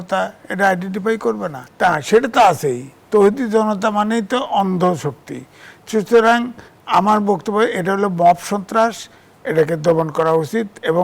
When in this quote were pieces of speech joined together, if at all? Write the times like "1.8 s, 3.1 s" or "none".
1.5 s